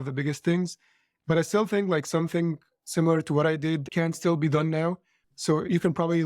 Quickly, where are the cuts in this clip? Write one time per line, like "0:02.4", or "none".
0:05.2